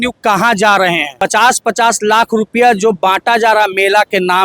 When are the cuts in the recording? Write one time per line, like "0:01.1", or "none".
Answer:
0:01.1